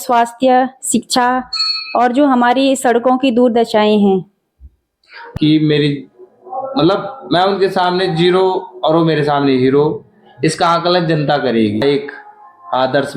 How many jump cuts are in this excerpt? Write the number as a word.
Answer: two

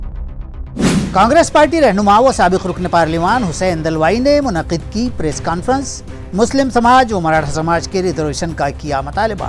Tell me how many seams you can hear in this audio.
one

